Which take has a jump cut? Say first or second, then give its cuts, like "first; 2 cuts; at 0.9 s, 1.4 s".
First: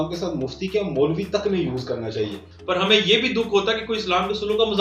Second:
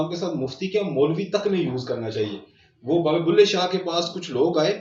first; 1 cut; at 2.5 s